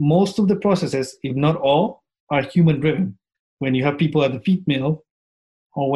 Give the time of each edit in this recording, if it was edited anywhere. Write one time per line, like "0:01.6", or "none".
0:03.3